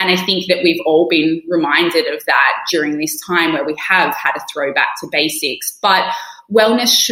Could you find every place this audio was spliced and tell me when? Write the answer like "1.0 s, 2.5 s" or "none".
2.7 s